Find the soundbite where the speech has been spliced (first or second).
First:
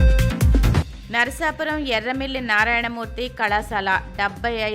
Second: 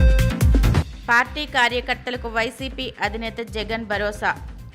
first